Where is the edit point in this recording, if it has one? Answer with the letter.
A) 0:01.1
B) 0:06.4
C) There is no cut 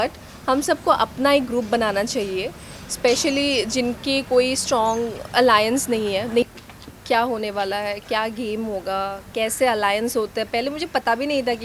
B